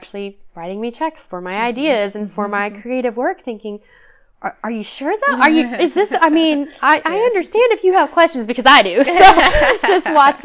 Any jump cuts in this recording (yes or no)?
no